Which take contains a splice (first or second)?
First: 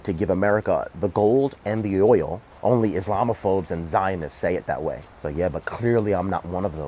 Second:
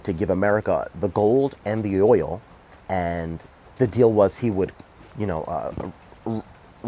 first